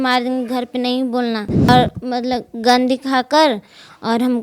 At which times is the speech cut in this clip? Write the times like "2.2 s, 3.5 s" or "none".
1.7 s